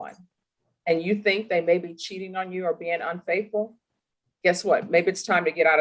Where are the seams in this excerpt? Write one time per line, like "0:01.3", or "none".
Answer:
none